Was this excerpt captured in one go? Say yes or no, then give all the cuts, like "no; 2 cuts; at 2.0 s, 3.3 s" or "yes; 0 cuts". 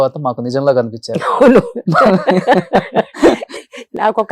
yes; 0 cuts